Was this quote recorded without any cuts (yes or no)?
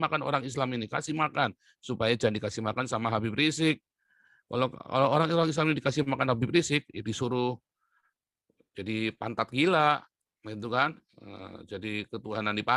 yes